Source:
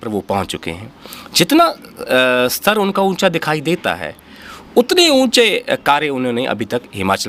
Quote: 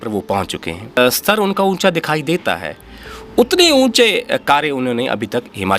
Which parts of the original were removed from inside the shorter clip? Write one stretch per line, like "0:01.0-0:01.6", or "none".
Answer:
0:01.0-0:02.3